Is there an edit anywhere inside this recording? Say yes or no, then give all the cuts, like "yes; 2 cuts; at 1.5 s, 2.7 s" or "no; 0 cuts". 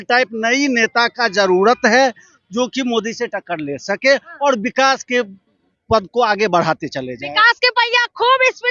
no; 0 cuts